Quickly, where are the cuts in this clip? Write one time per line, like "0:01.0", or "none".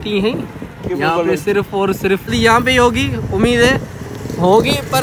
0:02.3